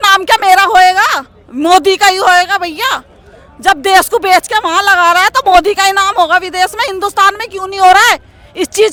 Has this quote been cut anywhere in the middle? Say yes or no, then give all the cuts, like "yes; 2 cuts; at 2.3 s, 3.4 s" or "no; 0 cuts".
no; 0 cuts